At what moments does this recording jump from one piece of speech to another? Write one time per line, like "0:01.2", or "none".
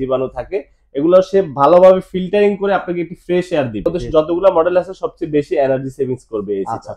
0:04.0